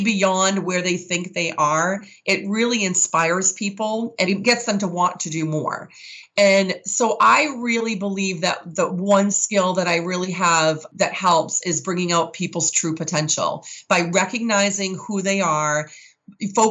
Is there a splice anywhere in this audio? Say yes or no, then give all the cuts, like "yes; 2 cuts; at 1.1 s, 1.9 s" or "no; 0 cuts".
yes; 2 cuts; at 4.3 s, 10.9 s